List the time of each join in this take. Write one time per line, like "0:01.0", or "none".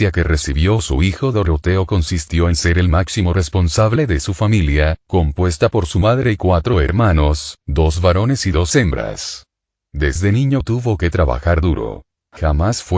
0:10.2